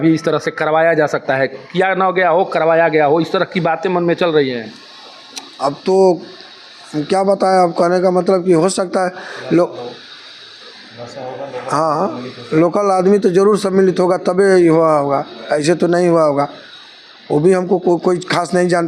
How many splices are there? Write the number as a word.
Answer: zero